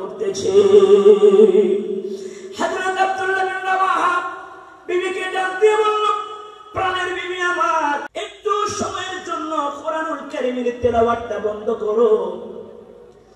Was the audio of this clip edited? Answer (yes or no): yes